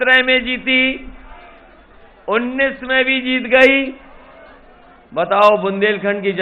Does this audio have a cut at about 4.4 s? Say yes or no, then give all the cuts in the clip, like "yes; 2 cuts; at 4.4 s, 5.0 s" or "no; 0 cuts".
no; 0 cuts